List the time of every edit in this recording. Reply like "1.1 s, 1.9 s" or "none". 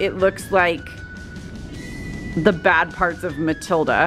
none